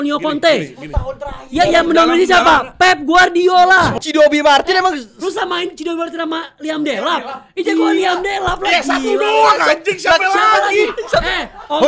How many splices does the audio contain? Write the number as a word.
one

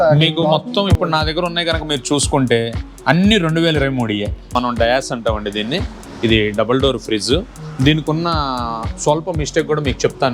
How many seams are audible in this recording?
one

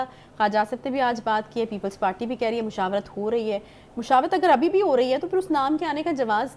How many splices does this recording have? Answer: zero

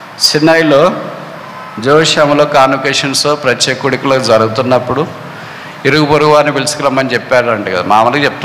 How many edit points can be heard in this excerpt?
zero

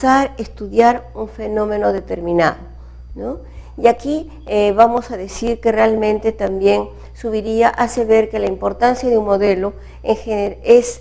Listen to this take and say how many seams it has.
one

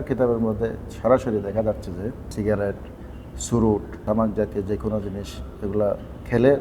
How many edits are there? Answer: two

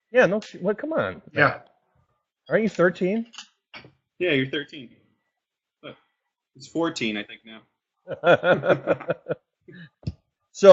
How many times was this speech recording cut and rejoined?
zero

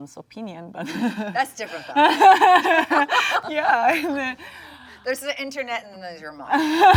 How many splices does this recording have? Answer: zero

